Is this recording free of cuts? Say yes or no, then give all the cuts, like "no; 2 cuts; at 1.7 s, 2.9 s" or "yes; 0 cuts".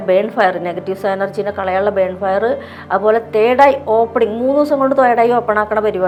yes; 0 cuts